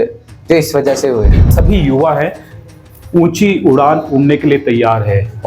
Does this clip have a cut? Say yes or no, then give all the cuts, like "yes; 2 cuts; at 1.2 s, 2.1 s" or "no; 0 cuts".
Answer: yes; 1 cut; at 1.5 s